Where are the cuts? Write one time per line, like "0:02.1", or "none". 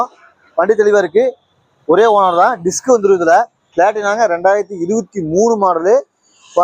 0:03.6